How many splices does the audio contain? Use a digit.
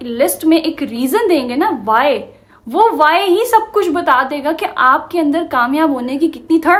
0